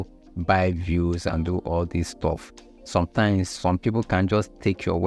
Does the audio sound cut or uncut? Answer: uncut